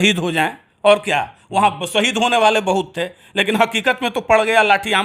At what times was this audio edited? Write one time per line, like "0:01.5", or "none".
none